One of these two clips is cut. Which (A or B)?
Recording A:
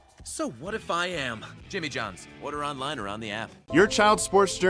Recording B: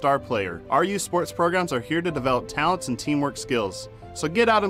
A